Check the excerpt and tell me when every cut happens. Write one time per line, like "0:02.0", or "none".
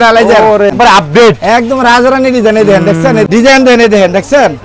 0:00.7
0:03.3